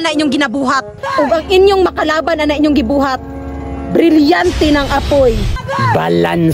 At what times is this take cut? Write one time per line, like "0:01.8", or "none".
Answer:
0:01.0
0:05.6

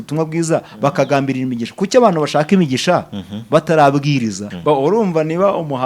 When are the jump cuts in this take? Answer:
0:04.5

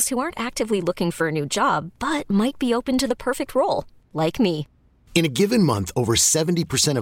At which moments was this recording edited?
none

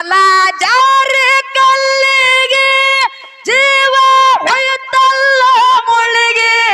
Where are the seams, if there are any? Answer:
none

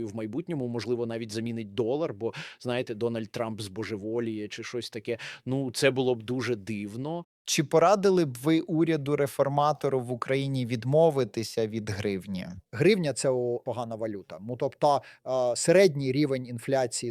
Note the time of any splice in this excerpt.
none

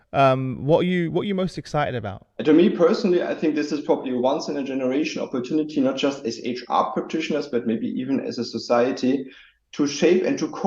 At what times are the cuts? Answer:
0:02.3

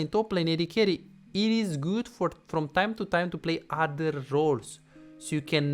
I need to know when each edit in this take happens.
none

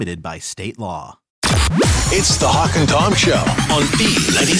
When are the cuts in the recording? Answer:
0:01.4

